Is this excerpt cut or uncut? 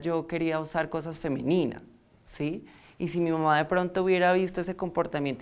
uncut